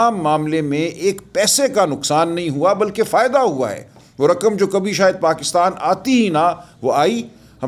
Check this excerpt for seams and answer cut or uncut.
uncut